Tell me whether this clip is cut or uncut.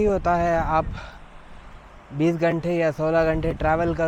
uncut